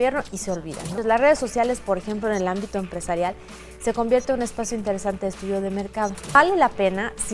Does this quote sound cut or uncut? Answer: cut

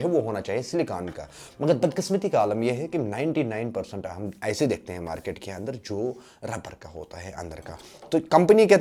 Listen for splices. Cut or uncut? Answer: uncut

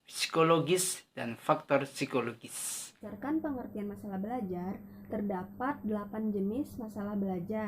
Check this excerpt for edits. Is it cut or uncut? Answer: cut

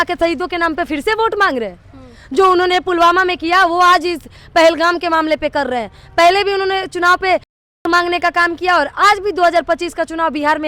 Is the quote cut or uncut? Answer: uncut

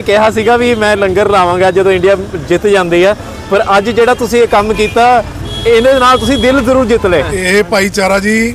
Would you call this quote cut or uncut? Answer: cut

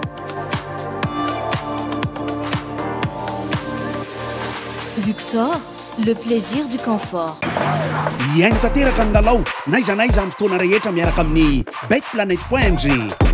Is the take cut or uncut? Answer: uncut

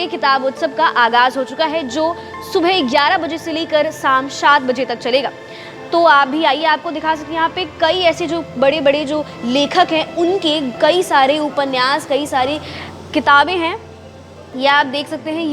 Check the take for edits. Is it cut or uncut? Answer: uncut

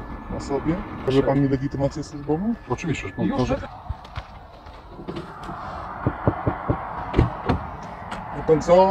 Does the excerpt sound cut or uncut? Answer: cut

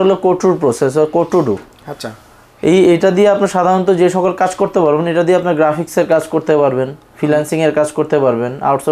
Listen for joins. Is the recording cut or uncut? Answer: uncut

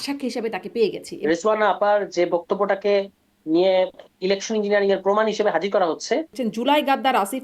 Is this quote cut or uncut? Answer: cut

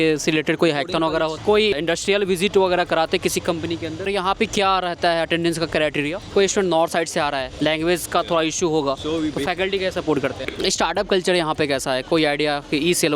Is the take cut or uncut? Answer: cut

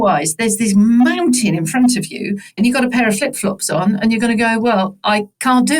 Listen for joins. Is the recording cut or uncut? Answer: cut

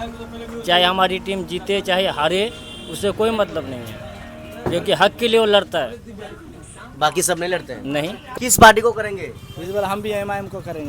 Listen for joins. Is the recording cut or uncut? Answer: cut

